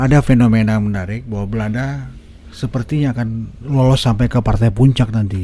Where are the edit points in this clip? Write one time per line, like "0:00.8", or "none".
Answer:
none